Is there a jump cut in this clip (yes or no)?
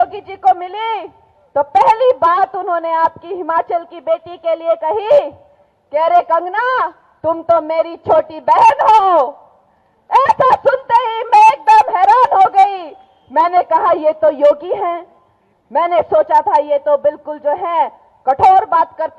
no